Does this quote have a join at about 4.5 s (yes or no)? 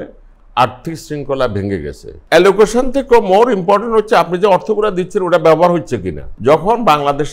no